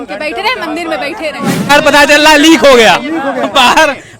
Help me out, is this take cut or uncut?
cut